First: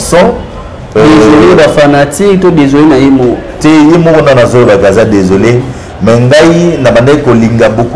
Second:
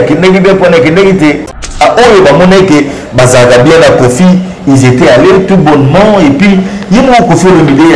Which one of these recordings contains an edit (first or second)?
second